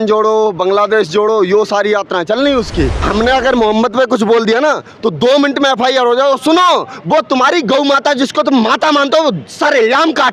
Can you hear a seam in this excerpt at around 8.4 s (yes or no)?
no